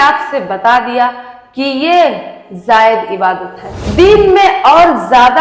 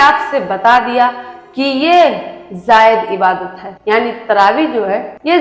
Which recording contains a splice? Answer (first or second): first